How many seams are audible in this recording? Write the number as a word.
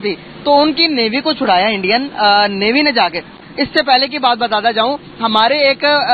one